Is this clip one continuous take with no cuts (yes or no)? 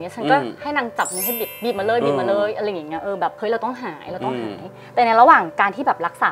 yes